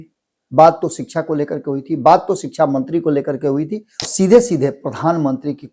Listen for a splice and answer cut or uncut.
cut